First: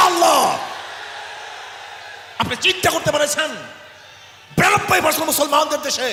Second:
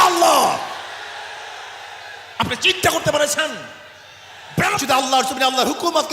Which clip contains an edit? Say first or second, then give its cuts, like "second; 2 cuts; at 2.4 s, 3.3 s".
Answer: second; 1 cut; at 4.8 s